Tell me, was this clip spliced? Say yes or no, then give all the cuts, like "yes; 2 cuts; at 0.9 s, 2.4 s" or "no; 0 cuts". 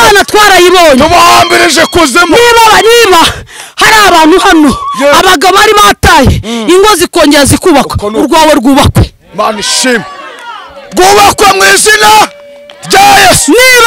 no; 0 cuts